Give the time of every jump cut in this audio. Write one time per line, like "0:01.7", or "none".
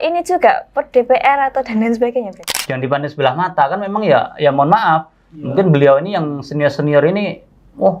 0:02.4

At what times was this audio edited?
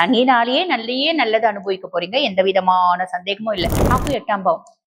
0:03.9

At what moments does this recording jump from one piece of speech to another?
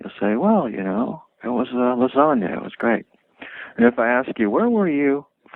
none

